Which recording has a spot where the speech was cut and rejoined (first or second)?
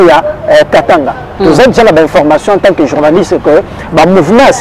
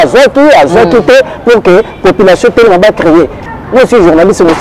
second